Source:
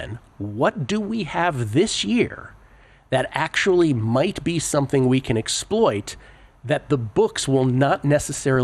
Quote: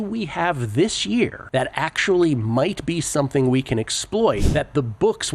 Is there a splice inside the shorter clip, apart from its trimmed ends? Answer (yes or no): yes